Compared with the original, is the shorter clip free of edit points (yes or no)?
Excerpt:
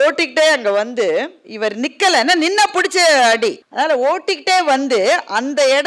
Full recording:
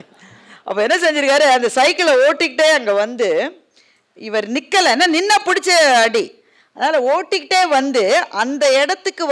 no